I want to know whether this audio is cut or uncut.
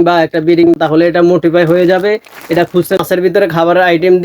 cut